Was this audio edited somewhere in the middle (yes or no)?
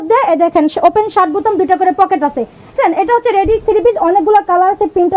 yes